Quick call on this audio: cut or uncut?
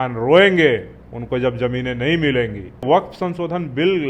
cut